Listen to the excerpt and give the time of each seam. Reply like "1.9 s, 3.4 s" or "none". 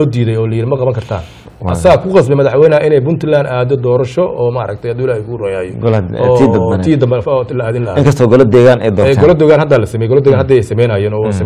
none